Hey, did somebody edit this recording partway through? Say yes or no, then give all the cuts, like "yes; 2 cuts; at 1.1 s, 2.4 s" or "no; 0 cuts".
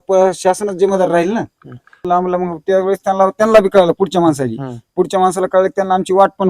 yes; 1 cut; at 2.0 s